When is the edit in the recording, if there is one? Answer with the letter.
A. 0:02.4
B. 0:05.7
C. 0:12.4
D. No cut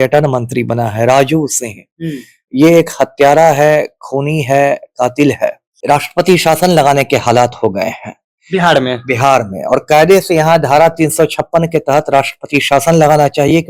B